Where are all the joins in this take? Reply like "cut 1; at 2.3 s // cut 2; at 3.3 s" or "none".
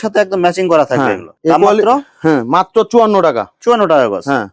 none